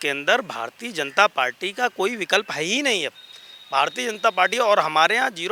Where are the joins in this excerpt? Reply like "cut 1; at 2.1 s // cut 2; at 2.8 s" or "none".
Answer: none